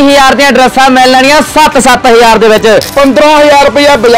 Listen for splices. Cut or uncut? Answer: cut